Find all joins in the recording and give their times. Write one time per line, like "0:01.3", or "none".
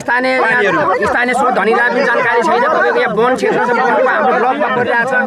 none